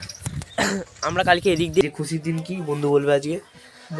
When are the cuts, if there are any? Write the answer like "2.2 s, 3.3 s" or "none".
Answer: 1.8 s